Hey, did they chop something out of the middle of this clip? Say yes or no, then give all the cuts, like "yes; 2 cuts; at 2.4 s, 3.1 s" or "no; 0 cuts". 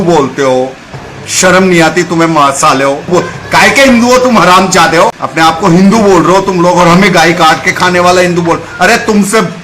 yes; 2 cuts; at 3.1 s, 5.2 s